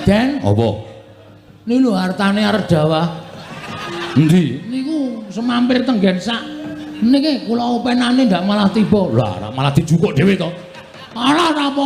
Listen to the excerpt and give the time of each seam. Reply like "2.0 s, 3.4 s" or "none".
none

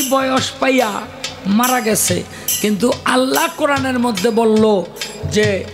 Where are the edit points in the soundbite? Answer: none

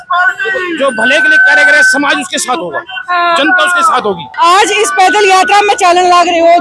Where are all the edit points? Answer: 4.3 s

